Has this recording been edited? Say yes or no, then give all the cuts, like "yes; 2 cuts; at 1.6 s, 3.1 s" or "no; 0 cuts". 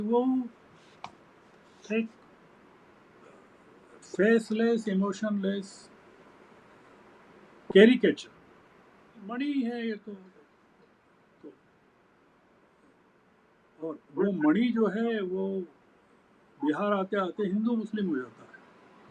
yes; 1 cut; at 9.3 s